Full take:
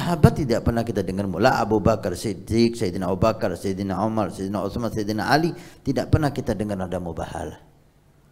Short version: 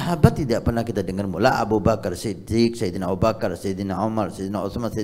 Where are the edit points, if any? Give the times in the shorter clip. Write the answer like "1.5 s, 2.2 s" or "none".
none